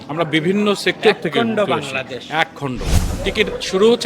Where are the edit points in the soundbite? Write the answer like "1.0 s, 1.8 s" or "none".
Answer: 3.0 s